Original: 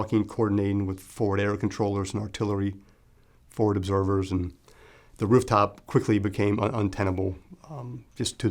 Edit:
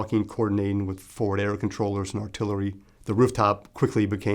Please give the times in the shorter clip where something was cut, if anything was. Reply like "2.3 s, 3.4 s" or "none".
2.9 s